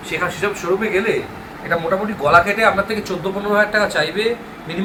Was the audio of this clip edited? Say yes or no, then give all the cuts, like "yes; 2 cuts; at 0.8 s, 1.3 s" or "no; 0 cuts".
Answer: no; 0 cuts